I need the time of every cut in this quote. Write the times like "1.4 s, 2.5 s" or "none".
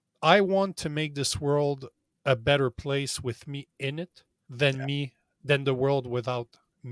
none

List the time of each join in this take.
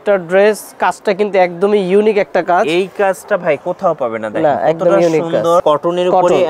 none

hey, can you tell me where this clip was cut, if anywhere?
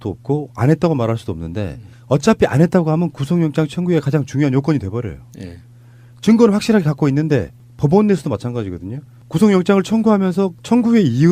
7.2 s

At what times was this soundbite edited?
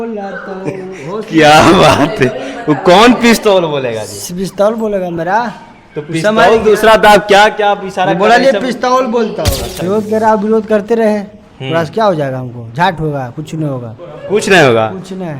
9.7 s

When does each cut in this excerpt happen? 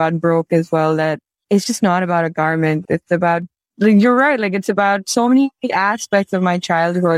none

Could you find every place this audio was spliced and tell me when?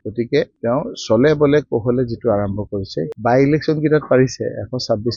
3.1 s

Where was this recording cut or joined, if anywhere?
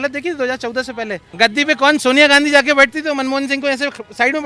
1.2 s

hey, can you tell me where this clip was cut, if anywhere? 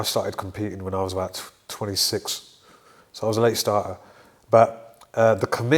none

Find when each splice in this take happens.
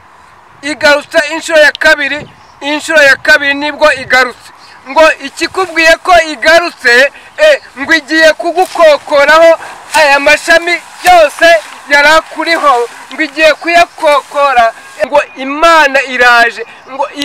14.9 s

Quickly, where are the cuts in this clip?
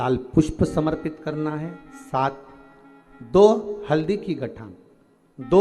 none

